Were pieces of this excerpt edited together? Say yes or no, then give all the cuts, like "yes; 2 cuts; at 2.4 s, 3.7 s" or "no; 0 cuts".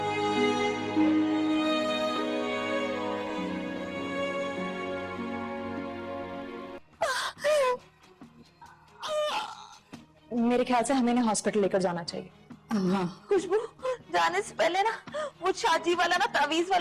yes; 1 cut; at 6.8 s